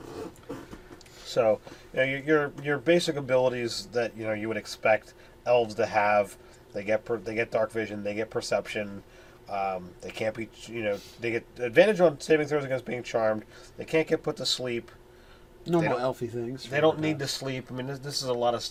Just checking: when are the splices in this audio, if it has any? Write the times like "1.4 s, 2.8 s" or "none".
none